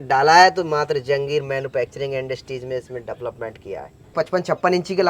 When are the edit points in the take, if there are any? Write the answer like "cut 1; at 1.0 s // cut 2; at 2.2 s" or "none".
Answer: cut 1; at 4.1 s